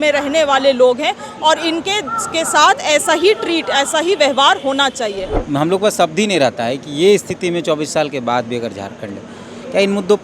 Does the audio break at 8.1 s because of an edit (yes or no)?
no